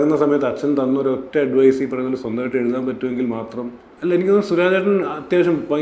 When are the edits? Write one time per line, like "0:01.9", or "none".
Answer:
0:03.8